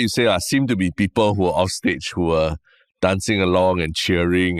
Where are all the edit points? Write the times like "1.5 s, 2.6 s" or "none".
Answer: none

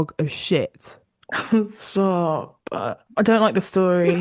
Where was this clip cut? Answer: 3.0 s

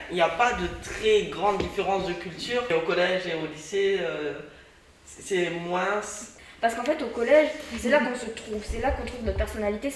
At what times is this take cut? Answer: 2.7 s

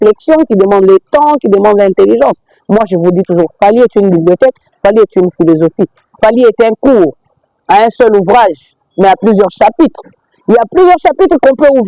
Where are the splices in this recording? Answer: none

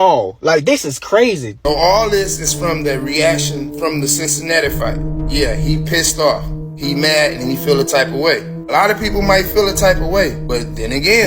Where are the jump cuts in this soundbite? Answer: 1.5 s

